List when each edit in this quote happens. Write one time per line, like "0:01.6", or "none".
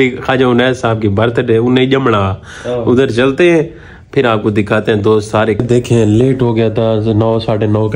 0:05.6